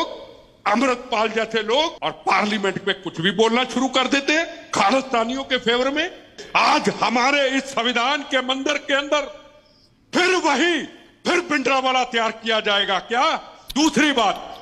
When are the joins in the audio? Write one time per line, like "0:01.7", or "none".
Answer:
0:02.0
0:06.3
0:13.5